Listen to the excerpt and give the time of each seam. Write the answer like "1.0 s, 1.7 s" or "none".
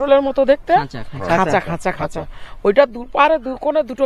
none